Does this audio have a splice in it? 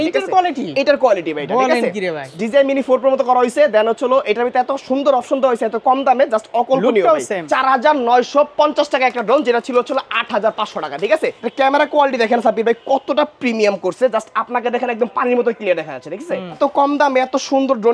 yes; 4 cuts; at 2.2 s, 7.5 s, 11.4 s, 16.6 s

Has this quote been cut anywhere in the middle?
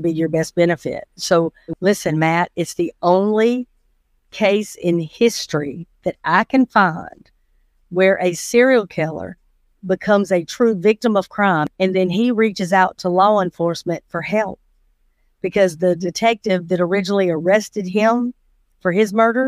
yes; 2 cuts; at 1.6 s, 11.7 s

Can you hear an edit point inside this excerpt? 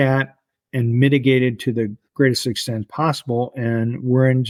no; 0 cuts

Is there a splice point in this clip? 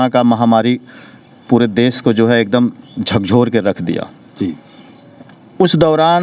no; 0 cuts

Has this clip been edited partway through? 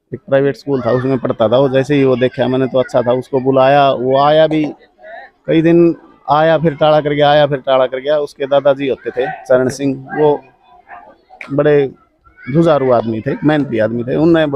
no; 0 cuts

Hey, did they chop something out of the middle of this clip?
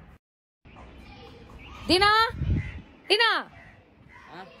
no; 0 cuts

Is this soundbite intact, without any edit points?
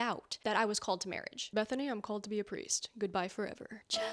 no; 1 cut; at 1.4 s

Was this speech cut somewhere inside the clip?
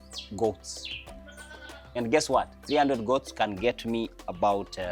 no; 0 cuts

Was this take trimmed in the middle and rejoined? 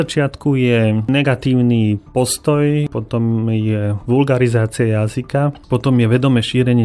yes; 2 cuts; at 1.1 s, 2.9 s

